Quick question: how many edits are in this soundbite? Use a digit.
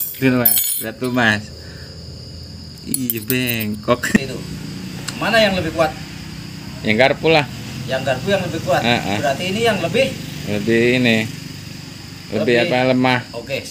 1